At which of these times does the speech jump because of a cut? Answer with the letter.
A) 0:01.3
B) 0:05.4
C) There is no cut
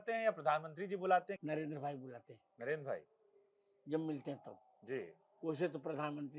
A